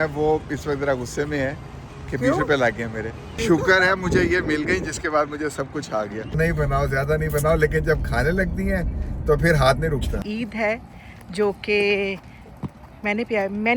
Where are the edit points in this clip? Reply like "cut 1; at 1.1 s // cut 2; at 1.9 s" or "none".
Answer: cut 1; at 3.4 s // cut 2; at 6.4 s // cut 3; at 10.1 s